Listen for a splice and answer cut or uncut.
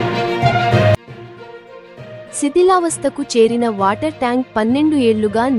uncut